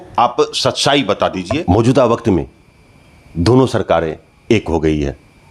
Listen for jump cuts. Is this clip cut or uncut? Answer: cut